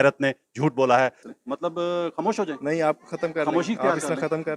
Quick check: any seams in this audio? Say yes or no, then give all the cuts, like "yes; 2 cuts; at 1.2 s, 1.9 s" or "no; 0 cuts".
yes; 1 cut; at 1.2 s